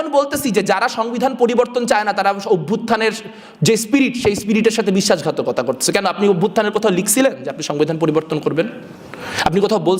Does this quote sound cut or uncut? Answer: uncut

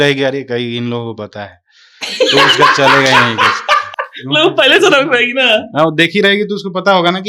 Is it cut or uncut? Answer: uncut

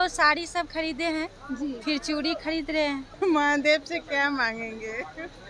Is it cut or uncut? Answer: cut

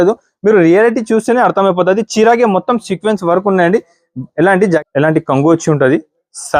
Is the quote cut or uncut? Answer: cut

